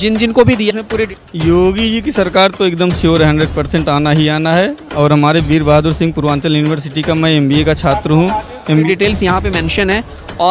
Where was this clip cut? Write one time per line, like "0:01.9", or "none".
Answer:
0:01.1
0:08.8